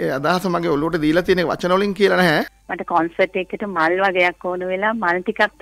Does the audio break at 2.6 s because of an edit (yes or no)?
yes